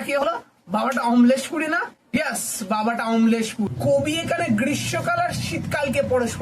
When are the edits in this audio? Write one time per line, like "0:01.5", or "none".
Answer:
0:03.7